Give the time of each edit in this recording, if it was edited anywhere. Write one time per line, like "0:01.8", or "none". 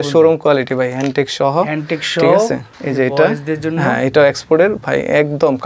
0:02.8